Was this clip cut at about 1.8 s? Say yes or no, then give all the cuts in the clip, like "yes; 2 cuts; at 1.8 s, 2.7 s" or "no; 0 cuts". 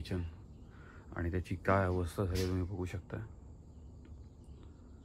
no; 0 cuts